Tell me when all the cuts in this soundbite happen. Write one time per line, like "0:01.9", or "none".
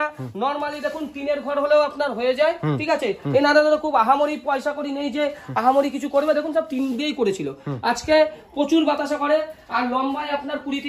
none